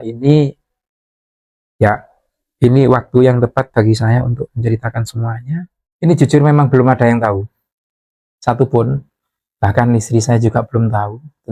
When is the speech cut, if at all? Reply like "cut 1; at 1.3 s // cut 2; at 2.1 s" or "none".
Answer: cut 1; at 5.8 s

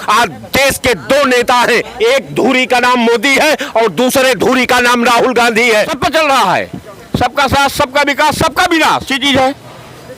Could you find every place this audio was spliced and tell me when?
cut 1; at 5.9 s // cut 2; at 9.1 s

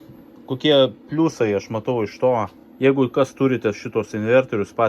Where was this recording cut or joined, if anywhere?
cut 1; at 2.6 s

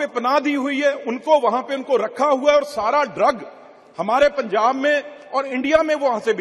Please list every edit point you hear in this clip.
none

